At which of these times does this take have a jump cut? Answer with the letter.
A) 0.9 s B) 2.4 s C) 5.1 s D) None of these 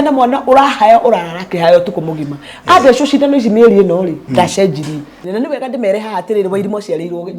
C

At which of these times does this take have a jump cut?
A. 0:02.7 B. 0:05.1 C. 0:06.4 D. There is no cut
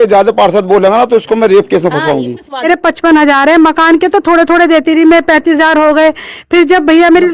A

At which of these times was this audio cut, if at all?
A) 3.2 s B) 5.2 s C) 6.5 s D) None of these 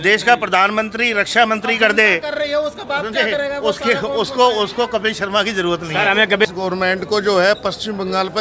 C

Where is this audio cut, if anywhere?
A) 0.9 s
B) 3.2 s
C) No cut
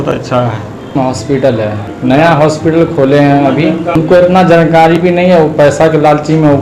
A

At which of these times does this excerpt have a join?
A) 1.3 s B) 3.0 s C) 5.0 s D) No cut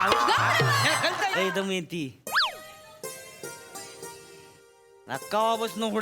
A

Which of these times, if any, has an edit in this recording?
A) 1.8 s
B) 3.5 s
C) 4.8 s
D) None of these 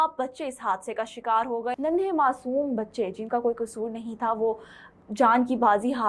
A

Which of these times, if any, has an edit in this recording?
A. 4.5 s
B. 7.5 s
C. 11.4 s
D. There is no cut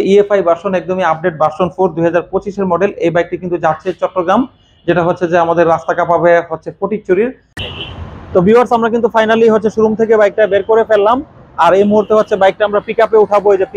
B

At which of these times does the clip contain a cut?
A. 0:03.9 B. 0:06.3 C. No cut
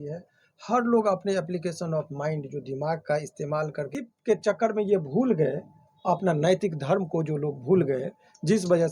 A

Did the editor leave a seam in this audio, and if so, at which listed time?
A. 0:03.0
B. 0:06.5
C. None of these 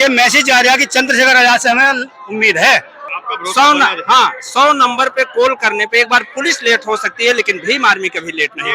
A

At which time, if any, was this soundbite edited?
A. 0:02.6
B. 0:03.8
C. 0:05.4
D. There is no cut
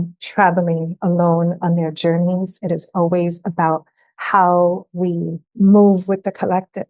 C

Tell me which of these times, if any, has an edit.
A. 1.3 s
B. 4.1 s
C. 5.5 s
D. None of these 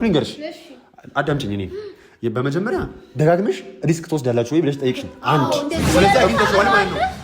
C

